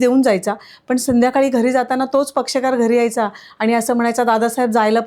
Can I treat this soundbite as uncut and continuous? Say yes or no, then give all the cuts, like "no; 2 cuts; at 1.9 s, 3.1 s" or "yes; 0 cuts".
yes; 0 cuts